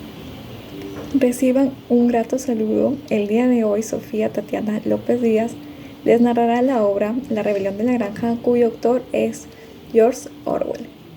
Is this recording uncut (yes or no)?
yes